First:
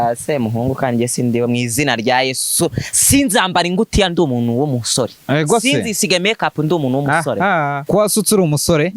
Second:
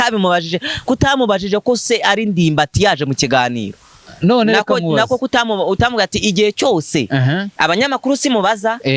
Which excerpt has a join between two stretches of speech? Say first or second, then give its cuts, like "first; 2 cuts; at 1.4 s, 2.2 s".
first; 1 cut; at 7.8 s